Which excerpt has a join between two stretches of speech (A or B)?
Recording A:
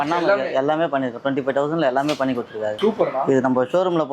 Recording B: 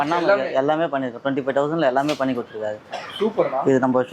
A